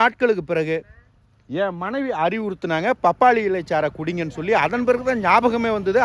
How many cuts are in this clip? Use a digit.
0